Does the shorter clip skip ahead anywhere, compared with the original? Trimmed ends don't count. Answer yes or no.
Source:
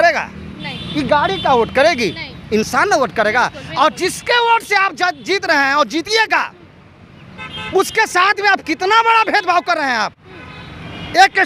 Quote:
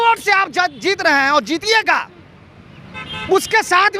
no